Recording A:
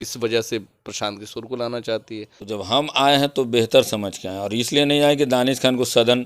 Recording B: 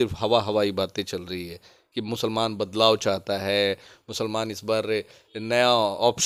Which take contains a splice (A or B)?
A